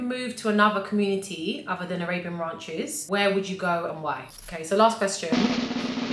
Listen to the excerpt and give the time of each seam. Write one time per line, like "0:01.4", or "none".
0:03.0
0:04.4

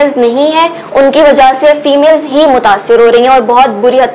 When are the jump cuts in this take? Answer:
none

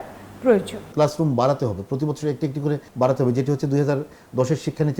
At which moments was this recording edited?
0:00.9
0:02.9

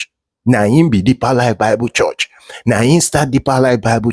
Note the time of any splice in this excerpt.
none

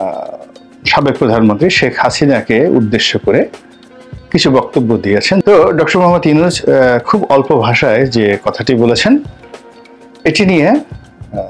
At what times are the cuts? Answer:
0:05.4

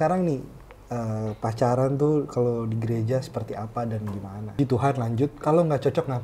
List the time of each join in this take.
0:04.6

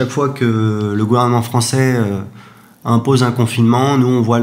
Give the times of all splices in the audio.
none

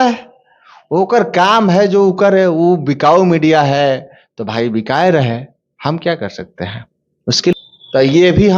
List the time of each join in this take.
0:07.5

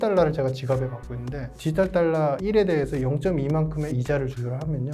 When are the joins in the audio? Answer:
0:01.5
0:02.4
0:03.9

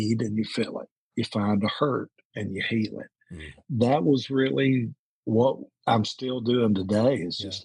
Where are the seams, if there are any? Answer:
0:03.6
0:05.7

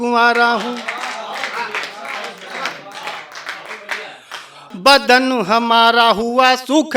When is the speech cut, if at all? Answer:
0:04.6

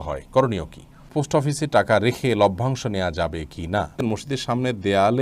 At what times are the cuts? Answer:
0:01.1
0:04.0

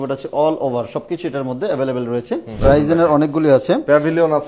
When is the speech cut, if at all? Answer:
0:02.5

